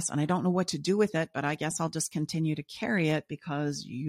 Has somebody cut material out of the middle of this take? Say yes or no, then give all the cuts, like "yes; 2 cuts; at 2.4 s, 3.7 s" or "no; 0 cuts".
no; 0 cuts